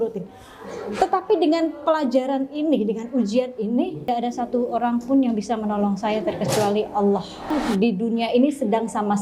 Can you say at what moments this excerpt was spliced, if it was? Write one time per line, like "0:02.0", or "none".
0:04.1
0:07.5